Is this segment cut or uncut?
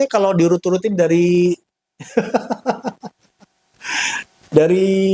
uncut